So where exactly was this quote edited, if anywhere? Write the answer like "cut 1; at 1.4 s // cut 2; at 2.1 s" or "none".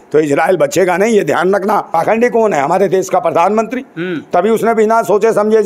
cut 1; at 1.9 s

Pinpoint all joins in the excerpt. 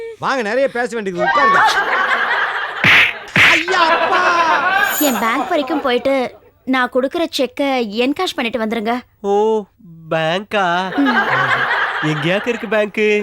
cut 1; at 4.9 s

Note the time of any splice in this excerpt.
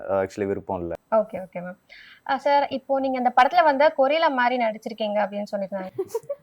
cut 1; at 1.0 s

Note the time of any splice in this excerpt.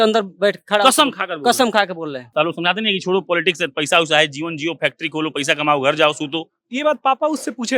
cut 1; at 2.2 s

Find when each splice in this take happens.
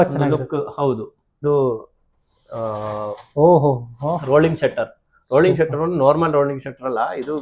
cut 1; at 1.4 s

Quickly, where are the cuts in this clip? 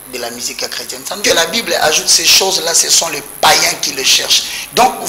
cut 1; at 1.2 s

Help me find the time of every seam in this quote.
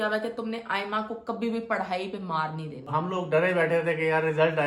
cut 1; at 2.9 s

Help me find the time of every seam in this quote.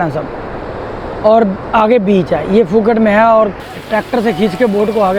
cut 1; at 3.6 s

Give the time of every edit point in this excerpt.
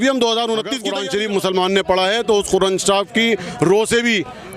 cut 1; at 0.9 s

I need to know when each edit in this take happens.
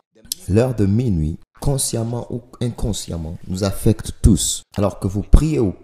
cut 1; at 4.6 s

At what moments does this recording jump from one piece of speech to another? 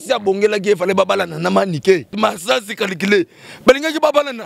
cut 1; at 2.1 s

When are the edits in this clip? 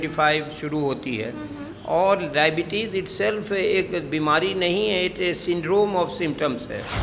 none

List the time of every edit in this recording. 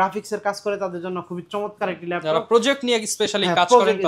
none

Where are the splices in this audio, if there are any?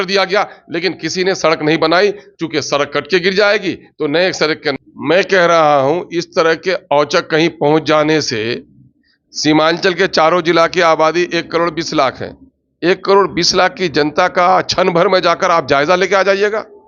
cut 1; at 4.7 s

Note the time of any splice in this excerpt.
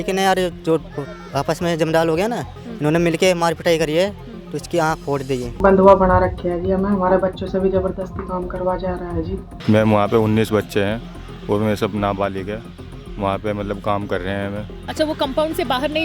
cut 1; at 5.5 s // cut 2; at 9.5 s // cut 3; at 14.9 s

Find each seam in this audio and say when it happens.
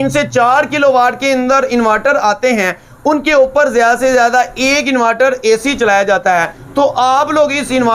cut 1; at 6.6 s

